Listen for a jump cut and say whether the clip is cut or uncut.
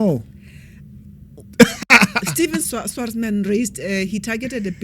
cut